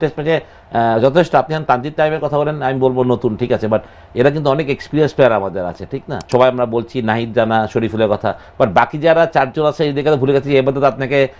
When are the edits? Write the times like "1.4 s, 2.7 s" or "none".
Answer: 6.1 s